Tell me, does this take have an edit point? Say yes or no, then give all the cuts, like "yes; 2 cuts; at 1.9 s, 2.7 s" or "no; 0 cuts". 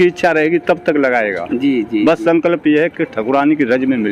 no; 0 cuts